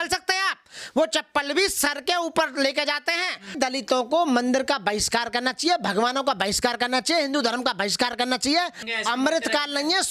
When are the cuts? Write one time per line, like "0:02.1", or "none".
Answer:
0:03.5
0:08.8